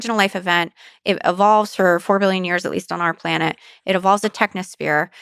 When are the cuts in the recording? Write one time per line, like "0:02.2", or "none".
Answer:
none